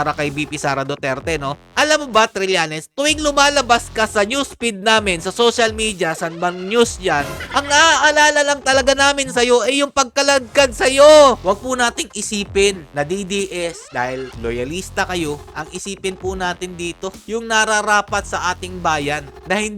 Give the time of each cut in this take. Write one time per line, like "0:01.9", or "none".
0:07.4
0:11.4
0:14.0